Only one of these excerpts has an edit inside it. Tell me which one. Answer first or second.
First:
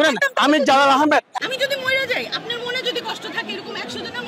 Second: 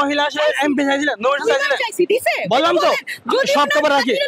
first